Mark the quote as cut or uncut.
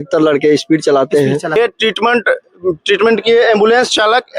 cut